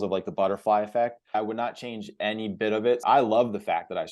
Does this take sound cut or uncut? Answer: cut